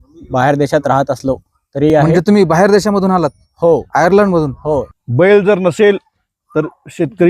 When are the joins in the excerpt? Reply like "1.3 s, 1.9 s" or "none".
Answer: 1.9 s, 4.9 s